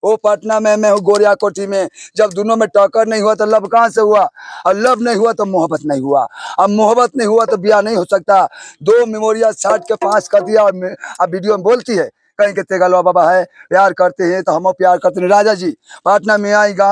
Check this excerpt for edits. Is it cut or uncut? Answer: uncut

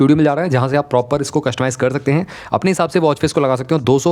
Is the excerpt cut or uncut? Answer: uncut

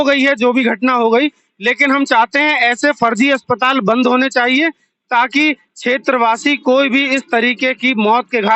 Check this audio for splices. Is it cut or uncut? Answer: uncut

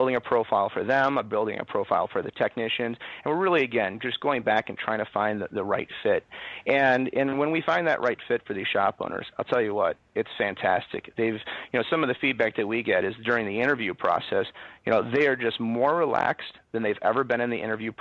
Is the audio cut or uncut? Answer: uncut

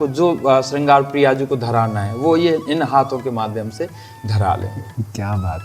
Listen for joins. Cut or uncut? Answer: uncut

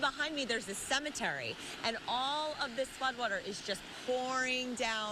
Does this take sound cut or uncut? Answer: uncut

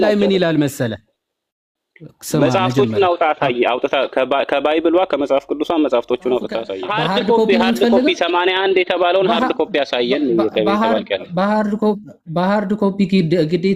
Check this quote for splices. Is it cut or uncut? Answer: cut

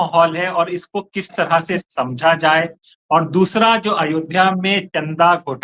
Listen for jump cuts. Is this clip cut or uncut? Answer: uncut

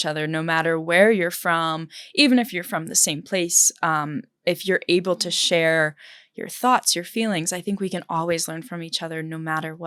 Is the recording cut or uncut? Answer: uncut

